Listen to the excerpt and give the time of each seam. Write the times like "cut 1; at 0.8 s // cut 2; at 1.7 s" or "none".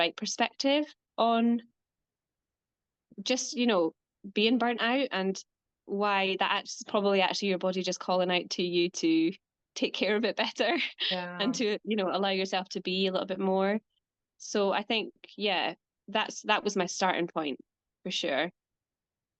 none